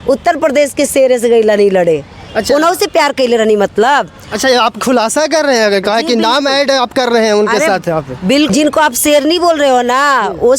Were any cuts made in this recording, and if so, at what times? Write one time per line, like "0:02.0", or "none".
0:08.5